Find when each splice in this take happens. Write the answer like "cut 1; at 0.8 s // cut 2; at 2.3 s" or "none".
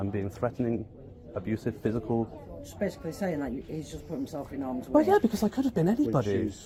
none